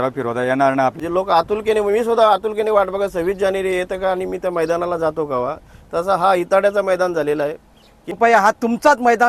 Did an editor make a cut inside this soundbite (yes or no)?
yes